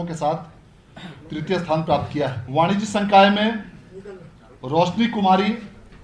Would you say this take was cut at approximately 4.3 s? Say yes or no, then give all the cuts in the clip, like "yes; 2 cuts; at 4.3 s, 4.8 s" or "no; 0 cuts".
no; 1 cut; at 2.4 s